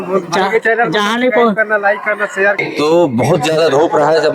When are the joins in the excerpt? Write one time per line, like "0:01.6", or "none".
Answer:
0:02.6